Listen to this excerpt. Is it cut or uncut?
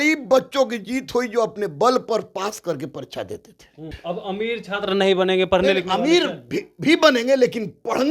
cut